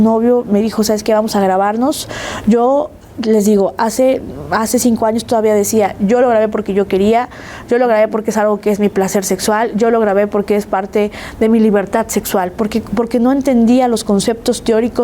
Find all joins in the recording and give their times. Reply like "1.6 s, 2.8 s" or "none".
none